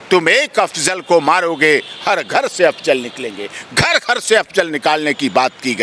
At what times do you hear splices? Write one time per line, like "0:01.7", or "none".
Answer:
none